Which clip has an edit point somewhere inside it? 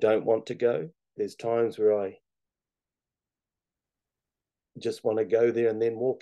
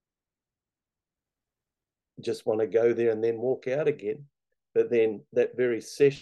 first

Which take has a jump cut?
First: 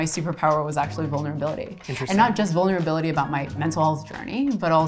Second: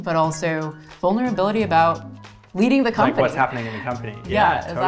first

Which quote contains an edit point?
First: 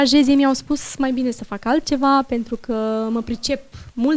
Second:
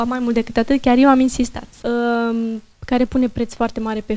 second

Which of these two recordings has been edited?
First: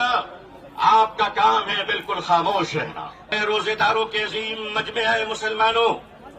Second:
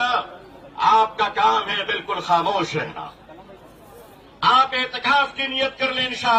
first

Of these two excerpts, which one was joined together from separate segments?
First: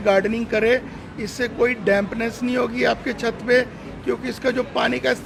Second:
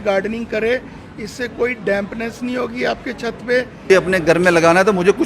second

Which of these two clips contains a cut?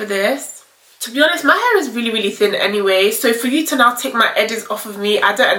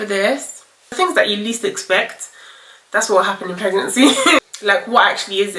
second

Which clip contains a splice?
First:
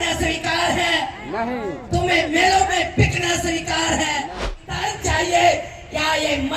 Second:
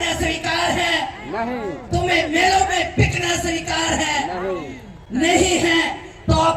first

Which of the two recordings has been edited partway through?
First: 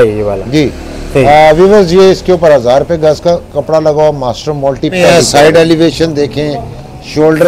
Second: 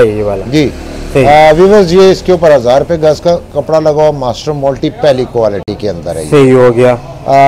first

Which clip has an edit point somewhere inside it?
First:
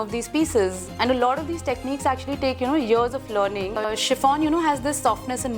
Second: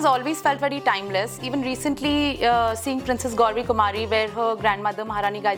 first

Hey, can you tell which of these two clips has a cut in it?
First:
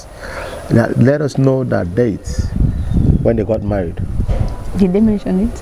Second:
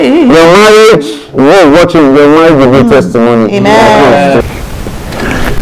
second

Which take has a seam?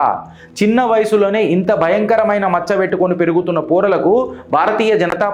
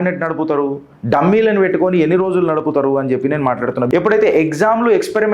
second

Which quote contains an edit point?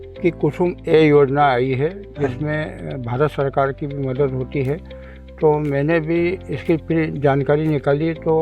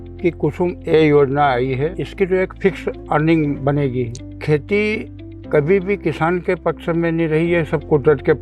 second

